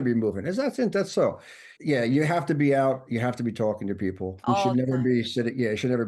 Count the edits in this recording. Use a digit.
1